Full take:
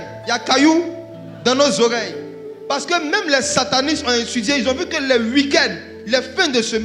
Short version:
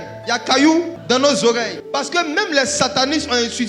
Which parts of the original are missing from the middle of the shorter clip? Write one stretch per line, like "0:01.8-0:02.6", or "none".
0:01.0-0:01.3
0:02.1-0:02.5